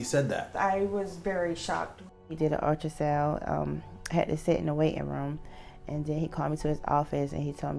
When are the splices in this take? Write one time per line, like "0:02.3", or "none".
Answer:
0:02.2